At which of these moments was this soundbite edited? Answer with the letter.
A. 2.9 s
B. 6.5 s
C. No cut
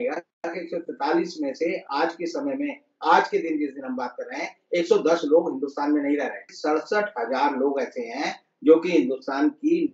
B